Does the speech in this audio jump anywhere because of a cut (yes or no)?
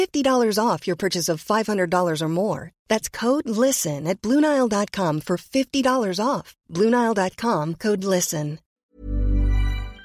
yes